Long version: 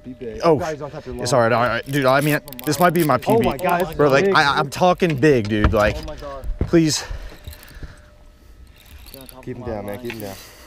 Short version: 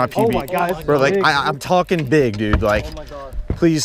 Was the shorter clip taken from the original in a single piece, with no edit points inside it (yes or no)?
yes